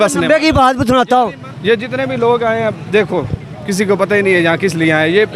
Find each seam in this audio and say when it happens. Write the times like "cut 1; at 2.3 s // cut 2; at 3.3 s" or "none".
cut 1; at 1.4 s